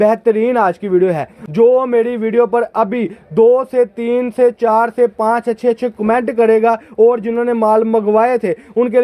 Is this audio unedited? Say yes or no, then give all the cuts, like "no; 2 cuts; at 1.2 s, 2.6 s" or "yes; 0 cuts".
no; 1 cut; at 1.4 s